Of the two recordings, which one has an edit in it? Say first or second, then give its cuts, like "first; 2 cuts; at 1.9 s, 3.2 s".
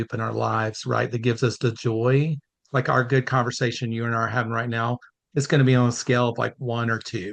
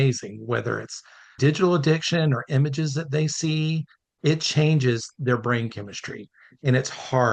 second; 2 cuts; at 1.2 s, 4.1 s